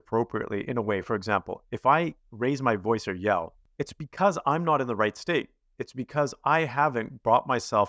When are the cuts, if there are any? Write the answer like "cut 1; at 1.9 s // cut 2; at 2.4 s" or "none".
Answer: cut 1; at 3.6 s